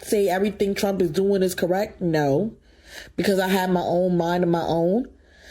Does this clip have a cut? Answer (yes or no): no